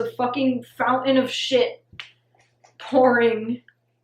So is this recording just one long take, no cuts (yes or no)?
yes